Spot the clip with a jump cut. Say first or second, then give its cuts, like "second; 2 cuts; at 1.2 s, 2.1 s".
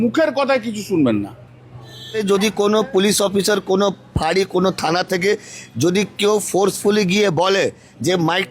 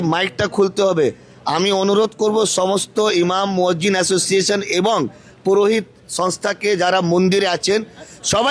first; 1 cut; at 2.2 s